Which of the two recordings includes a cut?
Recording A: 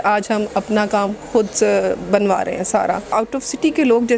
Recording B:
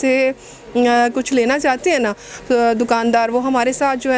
A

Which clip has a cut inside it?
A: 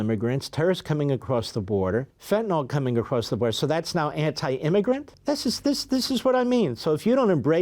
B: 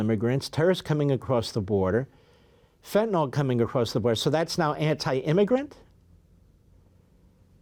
A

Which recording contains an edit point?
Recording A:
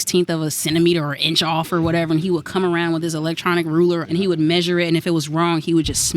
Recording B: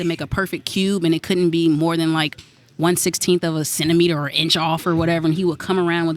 A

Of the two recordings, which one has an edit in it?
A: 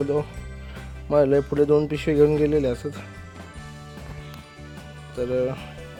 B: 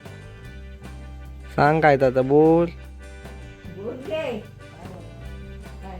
B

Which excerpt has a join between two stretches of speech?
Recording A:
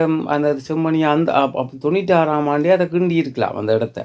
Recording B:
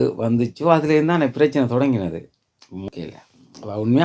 B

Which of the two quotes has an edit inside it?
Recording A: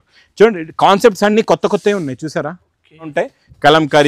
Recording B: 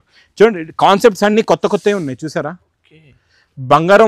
A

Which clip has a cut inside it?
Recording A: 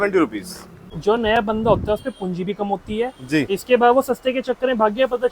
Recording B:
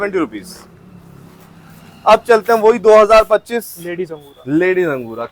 A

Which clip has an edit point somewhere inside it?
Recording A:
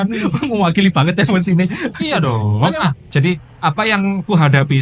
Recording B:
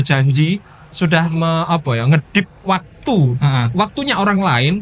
A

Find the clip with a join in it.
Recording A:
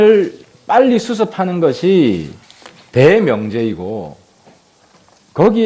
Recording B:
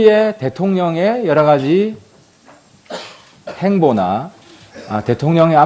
A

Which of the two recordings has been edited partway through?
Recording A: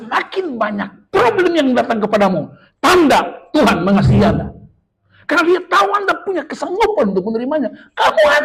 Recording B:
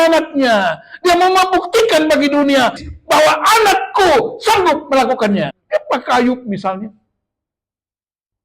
B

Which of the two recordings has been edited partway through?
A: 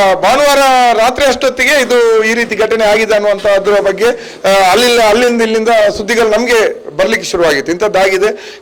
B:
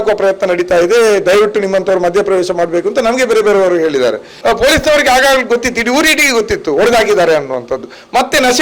B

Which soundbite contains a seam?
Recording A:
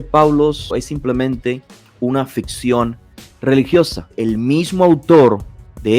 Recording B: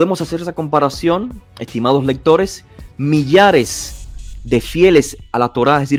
A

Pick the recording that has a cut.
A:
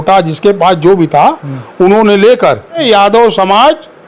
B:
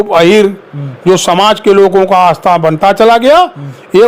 A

